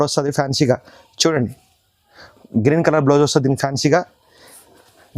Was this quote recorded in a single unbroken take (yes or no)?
yes